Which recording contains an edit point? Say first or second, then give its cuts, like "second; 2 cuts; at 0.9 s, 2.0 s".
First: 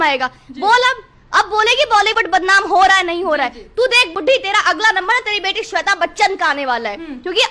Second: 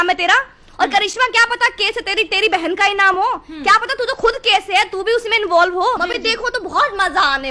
second; 1 cut; at 6.0 s